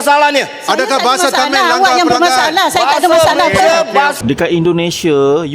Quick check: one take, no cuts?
no; 1 cut; at 4.1 s

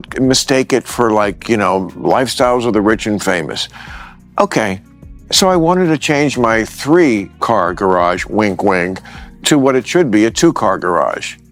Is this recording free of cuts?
yes; 0 cuts

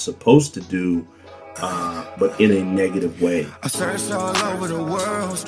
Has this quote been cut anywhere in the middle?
yes; 1 cut; at 3.6 s

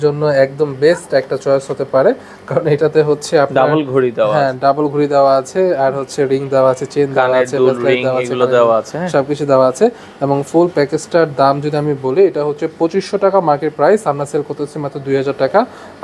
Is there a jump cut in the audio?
no; 0 cuts

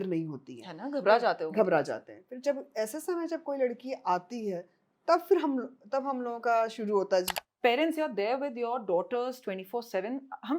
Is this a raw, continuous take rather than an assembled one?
no; 1 cut; at 7.3 s

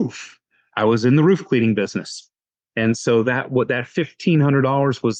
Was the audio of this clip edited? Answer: no; 0 cuts

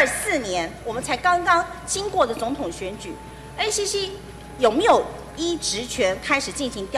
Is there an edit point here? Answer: no; 0 cuts

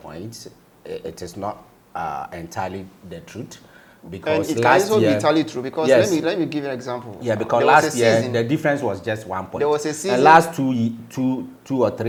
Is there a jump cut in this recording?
no; 0 cuts

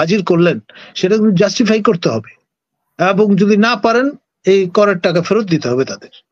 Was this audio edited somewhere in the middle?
no; 0 cuts

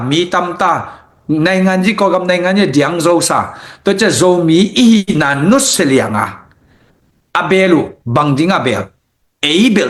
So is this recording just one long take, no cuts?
yes; 0 cuts

